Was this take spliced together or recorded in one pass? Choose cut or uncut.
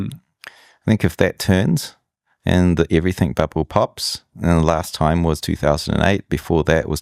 uncut